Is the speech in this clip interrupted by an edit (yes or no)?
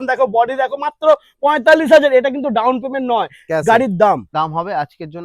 yes